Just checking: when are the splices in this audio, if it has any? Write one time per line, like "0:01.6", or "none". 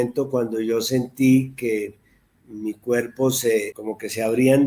0:03.8